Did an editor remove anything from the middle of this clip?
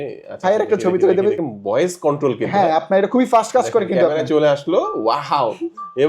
yes; 1 cut; at 1.4 s

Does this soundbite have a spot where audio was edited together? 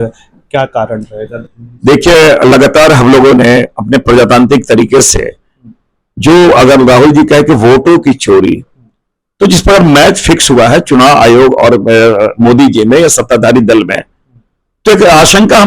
no; 0 cuts

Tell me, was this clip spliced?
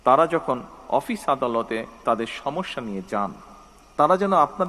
no; 0 cuts

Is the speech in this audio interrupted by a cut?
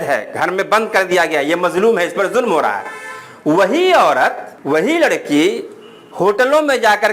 yes; 1 cut; at 4.5 s

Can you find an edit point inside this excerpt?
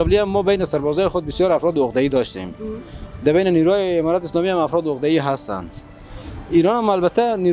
no; 0 cuts

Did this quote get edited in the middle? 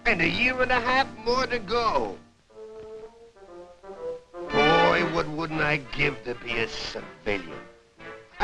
no; 0 cuts

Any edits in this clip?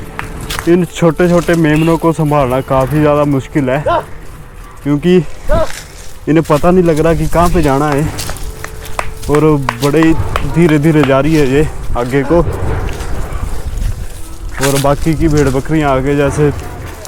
no; 0 cuts

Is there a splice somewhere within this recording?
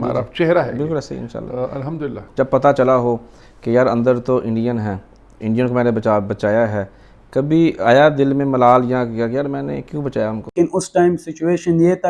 yes; 2 cuts; at 2.2 s, 10.5 s

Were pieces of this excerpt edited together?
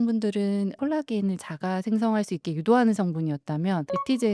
no; 0 cuts

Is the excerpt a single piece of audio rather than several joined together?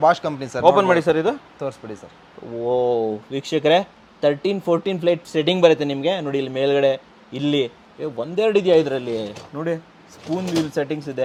yes; 0 cuts

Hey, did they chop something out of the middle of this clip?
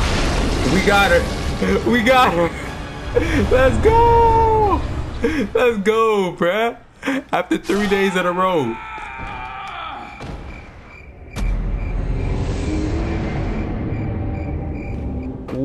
no; 0 cuts

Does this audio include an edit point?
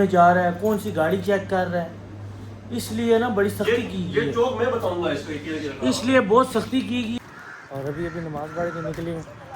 yes; 1 cut; at 7.2 s

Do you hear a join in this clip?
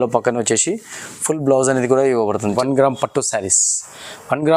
yes; 1 cut; at 2.5 s

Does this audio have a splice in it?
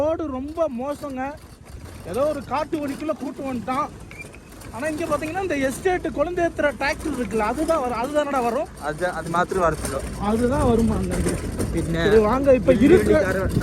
no; 0 cuts

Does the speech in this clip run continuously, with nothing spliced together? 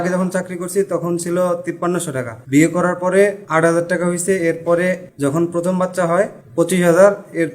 no; 4 cuts; at 1.9 s, 3.4 s, 5.1 s, 6.4 s

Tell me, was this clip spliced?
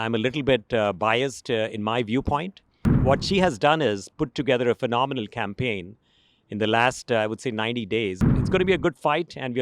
yes; 2 cuts; at 2.9 s, 8.3 s

